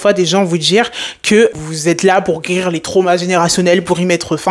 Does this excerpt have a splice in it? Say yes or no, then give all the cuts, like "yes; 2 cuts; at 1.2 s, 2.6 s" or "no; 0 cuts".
yes; 1 cut; at 1.5 s